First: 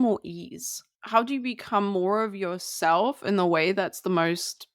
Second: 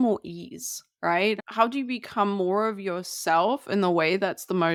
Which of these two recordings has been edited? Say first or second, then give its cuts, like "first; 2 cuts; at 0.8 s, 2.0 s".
first; 1 cut; at 1.0 s